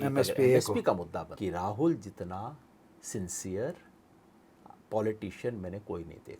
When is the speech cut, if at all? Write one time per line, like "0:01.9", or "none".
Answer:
0:01.3

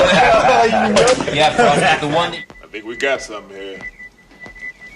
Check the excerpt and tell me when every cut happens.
0:02.2

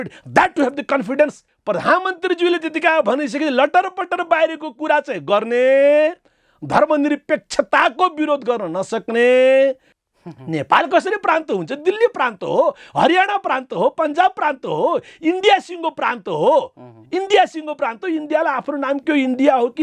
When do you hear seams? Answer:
0:01.5
0:09.9

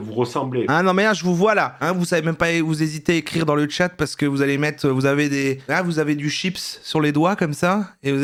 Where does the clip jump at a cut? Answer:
none

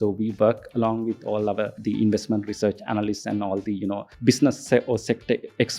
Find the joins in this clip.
0:01.8
0:04.1

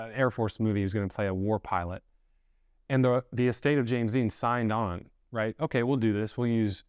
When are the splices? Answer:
none

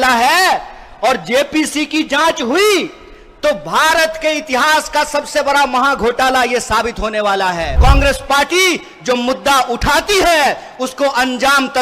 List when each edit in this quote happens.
0:07.8

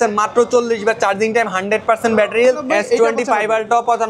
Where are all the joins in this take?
0:02.6

